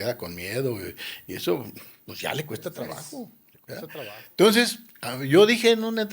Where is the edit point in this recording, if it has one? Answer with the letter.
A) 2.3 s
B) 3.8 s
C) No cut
B